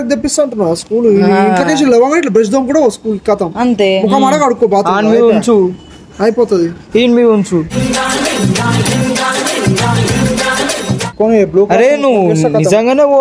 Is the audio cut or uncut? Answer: uncut